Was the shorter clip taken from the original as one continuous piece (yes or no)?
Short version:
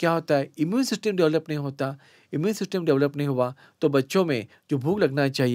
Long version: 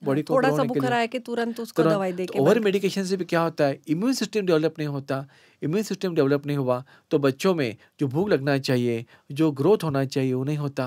yes